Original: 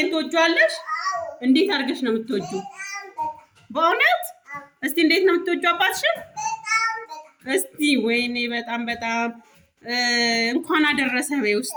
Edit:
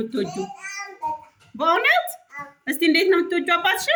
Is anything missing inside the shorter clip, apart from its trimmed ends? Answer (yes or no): no